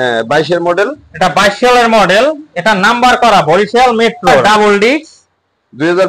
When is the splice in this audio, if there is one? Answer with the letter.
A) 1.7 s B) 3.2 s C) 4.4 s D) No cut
C